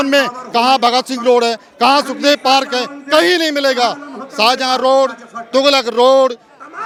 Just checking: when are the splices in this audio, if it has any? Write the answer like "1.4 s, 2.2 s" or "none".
none